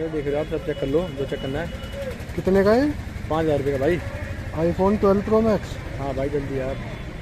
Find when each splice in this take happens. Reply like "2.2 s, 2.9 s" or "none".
none